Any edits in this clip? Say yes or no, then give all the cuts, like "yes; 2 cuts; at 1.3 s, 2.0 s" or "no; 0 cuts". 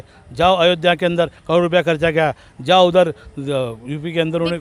no; 0 cuts